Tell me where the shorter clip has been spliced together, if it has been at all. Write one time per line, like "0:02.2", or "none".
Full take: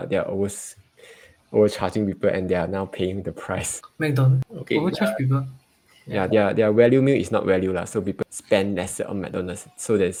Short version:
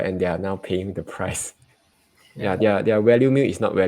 0:01.7